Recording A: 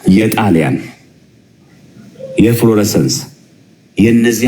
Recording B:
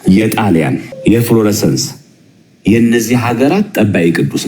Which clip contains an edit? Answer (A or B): B